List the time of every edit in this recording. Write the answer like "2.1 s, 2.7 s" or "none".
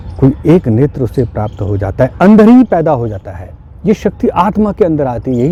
none